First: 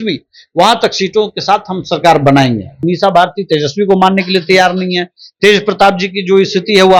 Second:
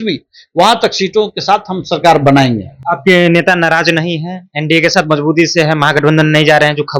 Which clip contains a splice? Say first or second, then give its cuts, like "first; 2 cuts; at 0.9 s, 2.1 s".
first; 1 cut; at 2.8 s